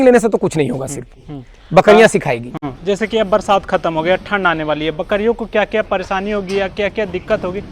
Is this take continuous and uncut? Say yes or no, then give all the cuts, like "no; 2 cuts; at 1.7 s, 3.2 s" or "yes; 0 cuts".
yes; 0 cuts